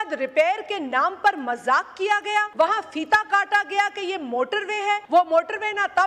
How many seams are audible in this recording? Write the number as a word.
two